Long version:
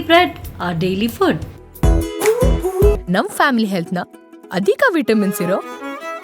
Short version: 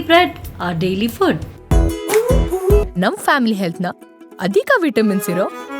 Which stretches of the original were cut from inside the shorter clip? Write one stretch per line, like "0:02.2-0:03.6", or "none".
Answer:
0:01.5-0:01.7